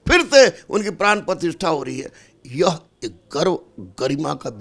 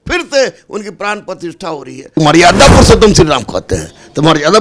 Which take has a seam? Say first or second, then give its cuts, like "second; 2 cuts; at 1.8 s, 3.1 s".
second; 1 cut; at 2.2 s